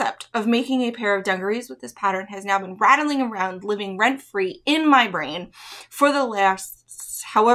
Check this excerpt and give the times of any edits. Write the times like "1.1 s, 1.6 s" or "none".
none